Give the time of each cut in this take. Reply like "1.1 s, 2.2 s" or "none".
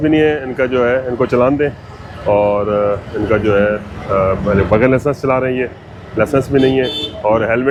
none

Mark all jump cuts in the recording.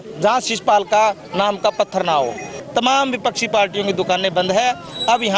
2.6 s

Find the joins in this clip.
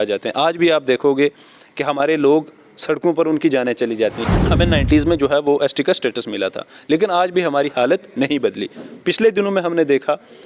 4.3 s

